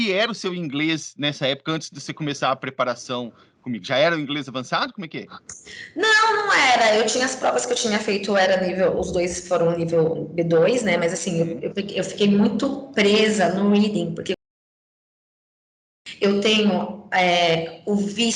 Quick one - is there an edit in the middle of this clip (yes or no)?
no